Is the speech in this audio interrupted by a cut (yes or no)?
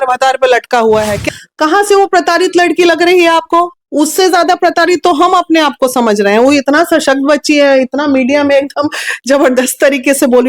yes